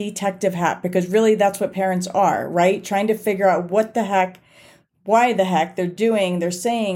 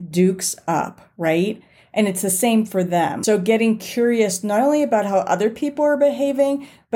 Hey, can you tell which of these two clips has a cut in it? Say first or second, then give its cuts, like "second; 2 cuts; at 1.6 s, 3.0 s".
second; 1 cut; at 3.2 s